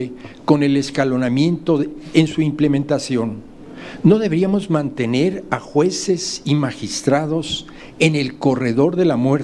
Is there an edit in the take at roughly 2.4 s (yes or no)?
no